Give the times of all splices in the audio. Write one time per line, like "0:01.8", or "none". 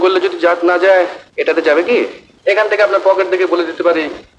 0:01.2
0:02.2